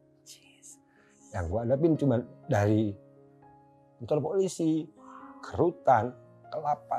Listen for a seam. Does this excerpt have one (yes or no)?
no